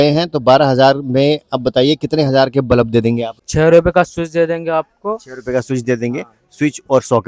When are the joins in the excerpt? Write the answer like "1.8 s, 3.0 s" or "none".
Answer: 3.4 s